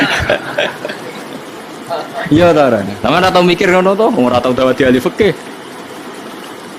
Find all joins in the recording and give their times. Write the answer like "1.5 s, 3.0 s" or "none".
5.5 s